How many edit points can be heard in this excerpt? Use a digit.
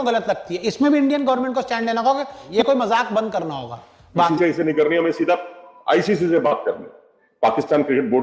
2